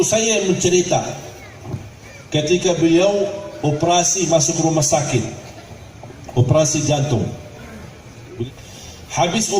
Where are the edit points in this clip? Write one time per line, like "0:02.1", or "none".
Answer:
0:08.4